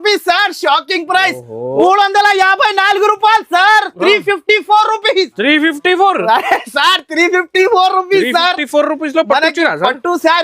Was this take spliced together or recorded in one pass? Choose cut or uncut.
cut